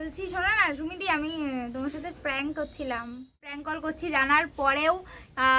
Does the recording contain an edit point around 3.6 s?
yes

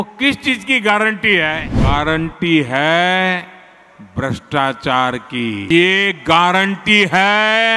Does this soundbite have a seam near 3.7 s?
no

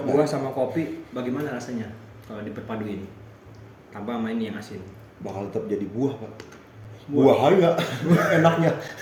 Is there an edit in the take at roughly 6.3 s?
no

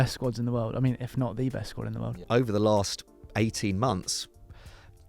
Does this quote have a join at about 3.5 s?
no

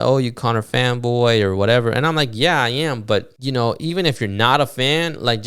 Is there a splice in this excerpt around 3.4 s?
yes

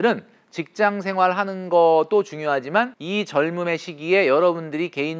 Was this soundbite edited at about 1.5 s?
no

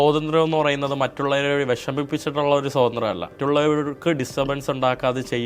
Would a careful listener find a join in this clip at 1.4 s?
no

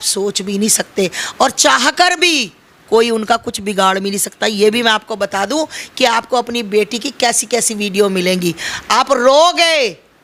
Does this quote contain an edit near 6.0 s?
no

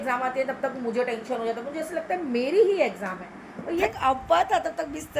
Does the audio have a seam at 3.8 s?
yes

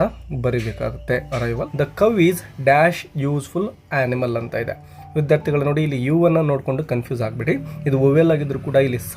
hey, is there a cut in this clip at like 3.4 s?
no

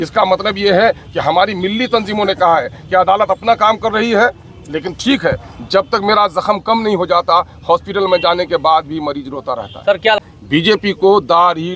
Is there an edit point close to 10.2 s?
yes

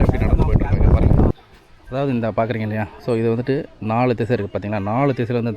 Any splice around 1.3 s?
yes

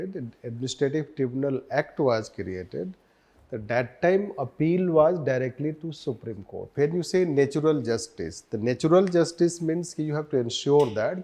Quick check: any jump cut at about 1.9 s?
no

